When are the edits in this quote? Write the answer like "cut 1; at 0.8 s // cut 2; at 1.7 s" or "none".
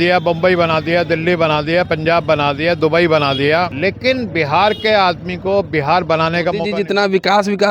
cut 1; at 3.7 s // cut 2; at 6.7 s